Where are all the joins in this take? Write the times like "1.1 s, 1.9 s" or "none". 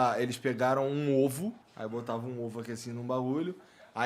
1.7 s

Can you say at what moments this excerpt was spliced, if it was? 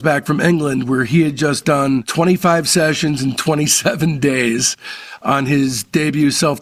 none

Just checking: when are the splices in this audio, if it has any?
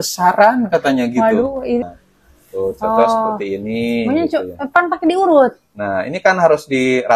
2.0 s

